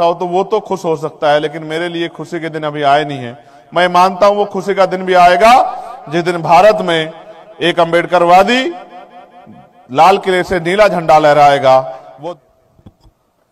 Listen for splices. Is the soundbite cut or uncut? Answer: cut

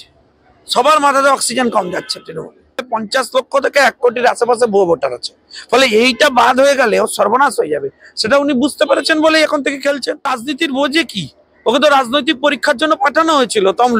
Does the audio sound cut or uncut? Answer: cut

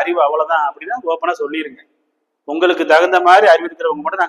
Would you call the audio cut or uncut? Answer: uncut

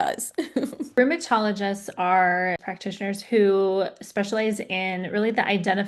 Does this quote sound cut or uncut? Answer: cut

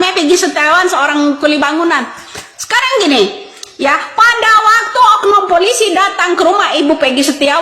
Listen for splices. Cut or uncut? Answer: uncut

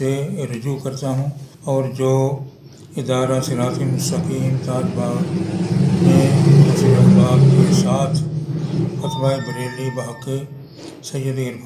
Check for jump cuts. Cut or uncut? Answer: cut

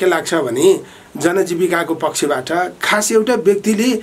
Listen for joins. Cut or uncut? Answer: uncut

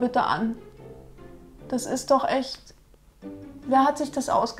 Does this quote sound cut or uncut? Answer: uncut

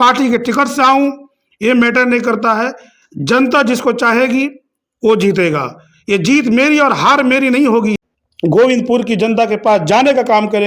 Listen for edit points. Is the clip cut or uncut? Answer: cut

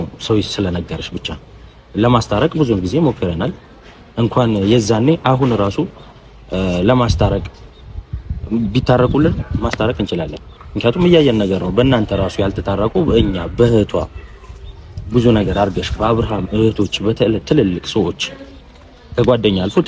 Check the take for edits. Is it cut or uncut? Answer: uncut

